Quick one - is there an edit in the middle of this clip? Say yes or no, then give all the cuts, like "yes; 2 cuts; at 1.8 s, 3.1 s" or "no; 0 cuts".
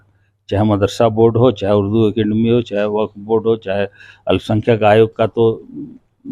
no; 0 cuts